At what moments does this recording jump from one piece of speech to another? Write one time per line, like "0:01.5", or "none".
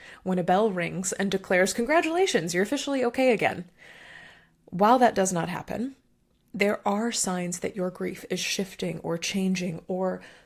none